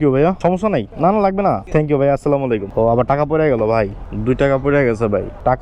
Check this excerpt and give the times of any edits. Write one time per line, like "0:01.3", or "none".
0:01.6
0:02.7